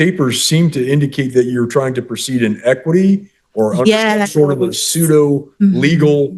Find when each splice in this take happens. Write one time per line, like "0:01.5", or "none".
none